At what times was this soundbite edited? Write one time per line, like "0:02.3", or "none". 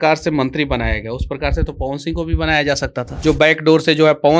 0:03.0